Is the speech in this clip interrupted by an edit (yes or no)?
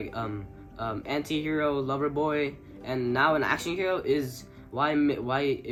no